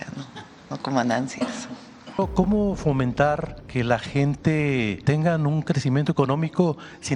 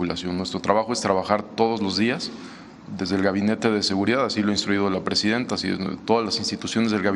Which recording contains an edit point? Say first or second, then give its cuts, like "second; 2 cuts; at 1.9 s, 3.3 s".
first; 3 cuts; at 2.2 s, 3.6 s, 5.0 s